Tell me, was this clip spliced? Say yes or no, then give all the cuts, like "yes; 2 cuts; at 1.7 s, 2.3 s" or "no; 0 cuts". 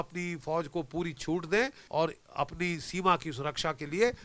yes; 1 cut; at 1.8 s